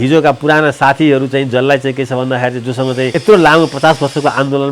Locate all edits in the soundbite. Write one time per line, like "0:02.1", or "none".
0:03.1

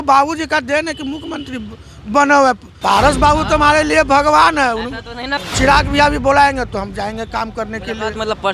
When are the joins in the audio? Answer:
0:02.7
0:05.3

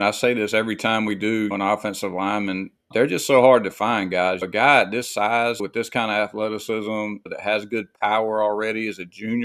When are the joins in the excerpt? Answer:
0:01.5
0:02.9
0:04.4
0:05.6
0:07.3

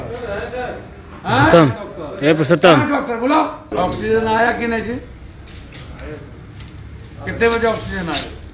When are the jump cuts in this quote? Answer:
0:03.7

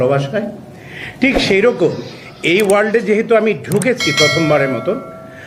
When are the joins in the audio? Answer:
none

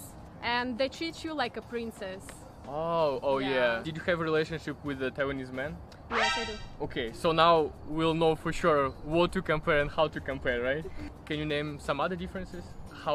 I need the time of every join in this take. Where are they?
none

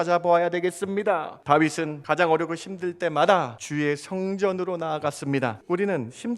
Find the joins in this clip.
0:01.3
0:02.0
0:03.6
0:05.6

